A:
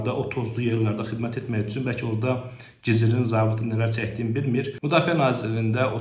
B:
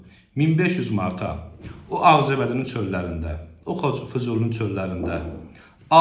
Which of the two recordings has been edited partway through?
A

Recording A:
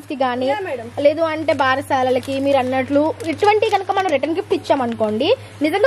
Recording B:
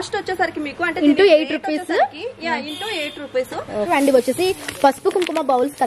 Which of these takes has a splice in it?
B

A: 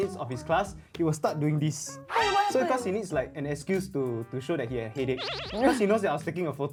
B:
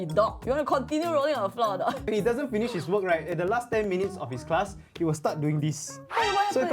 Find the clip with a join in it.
B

